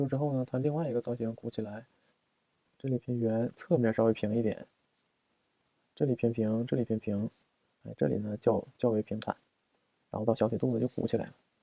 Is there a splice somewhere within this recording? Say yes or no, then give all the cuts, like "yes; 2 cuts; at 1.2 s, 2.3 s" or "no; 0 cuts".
yes; 1 cut; at 2.3 s